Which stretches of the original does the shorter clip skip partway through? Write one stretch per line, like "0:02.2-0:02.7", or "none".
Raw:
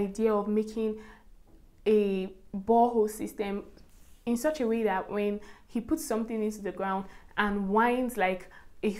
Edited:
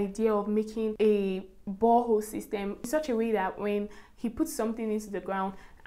0:00.9-0:01.8
0:03.7-0:04.4